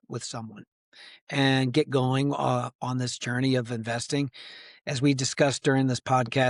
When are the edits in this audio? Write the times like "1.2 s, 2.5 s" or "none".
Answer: none